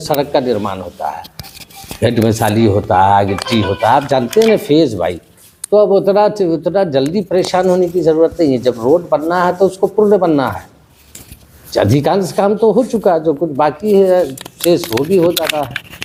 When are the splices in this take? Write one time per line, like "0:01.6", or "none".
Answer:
none